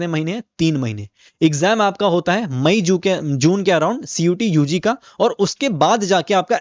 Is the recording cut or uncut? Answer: uncut